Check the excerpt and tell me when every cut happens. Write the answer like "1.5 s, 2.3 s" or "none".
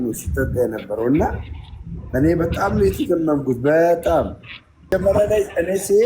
4.9 s